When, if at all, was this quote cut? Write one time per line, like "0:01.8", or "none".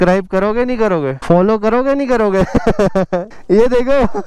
0:01.2
0:03.3